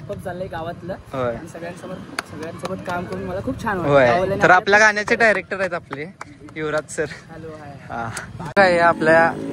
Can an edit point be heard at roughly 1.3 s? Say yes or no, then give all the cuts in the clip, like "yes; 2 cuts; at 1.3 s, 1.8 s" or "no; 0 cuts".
no; 1 cut; at 8.5 s